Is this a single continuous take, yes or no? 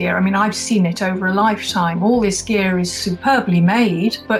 yes